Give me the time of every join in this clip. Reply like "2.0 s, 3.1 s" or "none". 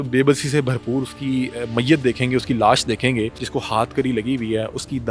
3.4 s

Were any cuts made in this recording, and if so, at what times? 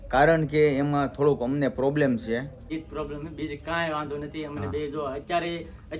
2.6 s

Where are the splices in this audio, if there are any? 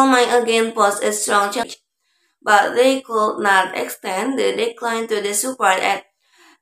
1.7 s

